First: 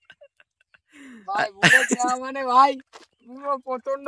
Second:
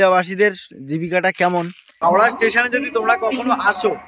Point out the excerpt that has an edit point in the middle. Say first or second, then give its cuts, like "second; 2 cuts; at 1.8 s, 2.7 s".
second; 1 cut; at 2.0 s